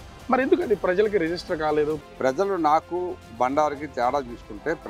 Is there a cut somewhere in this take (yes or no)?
yes